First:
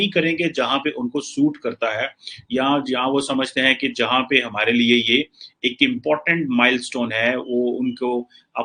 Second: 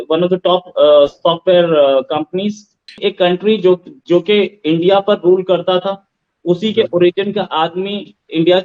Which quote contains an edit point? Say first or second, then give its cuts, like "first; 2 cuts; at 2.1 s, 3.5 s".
second; 1 cut; at 3.0 s